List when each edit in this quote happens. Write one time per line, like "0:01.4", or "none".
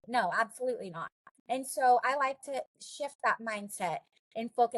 0:02.8